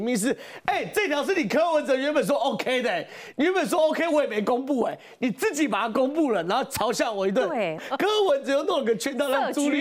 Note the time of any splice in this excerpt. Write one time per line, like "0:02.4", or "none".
0:07.8